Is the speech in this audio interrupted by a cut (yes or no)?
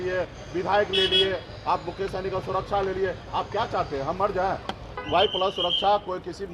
yes